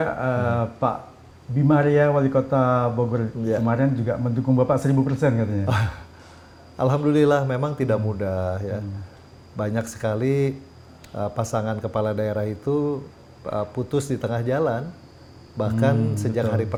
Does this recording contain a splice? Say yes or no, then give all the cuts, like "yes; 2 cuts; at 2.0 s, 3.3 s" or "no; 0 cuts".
no; 0 cuts